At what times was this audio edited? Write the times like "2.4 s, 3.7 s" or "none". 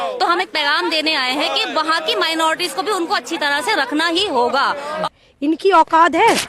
5.0 s

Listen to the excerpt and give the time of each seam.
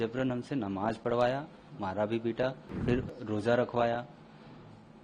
2.7 s

